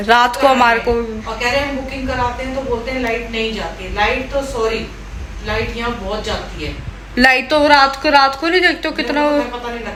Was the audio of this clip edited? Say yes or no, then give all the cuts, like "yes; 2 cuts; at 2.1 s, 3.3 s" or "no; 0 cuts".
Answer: no; 0 cuts